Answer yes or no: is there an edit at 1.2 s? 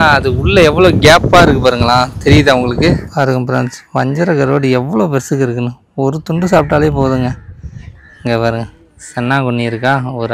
no